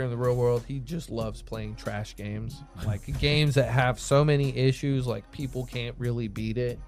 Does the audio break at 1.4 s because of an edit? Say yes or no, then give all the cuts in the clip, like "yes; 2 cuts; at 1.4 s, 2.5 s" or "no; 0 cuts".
no; 1 cut; at 2.7 s